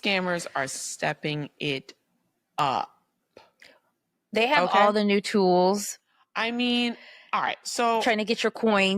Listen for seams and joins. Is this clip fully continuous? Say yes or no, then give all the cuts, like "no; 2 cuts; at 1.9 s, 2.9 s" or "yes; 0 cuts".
yes; 0 cuts